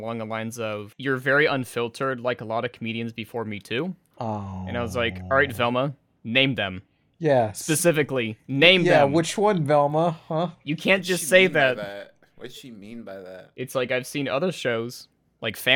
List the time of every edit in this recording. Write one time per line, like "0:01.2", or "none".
0:00.9